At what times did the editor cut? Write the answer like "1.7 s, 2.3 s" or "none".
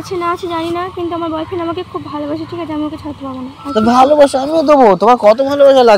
none